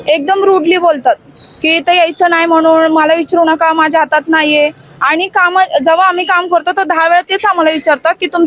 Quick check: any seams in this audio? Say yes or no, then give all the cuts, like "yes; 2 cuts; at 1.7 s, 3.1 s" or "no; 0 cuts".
no; 0 cuts